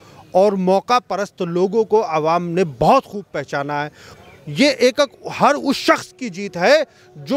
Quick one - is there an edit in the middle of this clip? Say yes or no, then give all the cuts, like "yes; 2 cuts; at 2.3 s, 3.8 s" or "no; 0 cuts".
yes; 1 cut; at 4.0 s